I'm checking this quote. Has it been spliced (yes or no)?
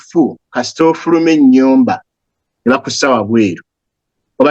no